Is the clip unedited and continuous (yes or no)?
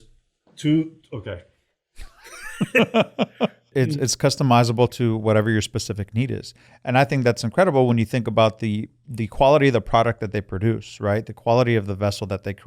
no